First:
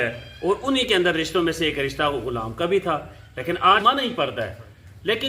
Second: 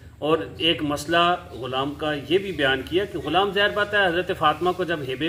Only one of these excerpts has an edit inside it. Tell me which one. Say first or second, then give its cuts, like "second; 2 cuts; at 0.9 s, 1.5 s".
first; 1 cut; at 3.8 s